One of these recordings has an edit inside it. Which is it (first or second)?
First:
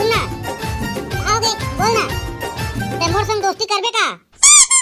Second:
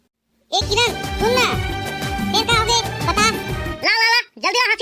second